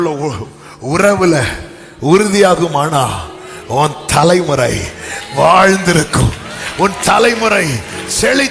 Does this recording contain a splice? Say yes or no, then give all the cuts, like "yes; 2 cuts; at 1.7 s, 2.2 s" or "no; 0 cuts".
no; 0 cuts